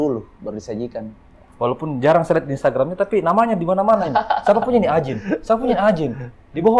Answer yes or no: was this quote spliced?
yes